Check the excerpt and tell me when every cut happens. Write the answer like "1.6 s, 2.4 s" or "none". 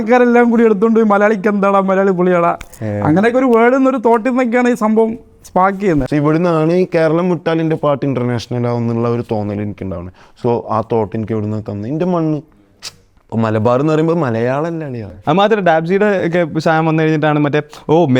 6.0 s, 15.2 s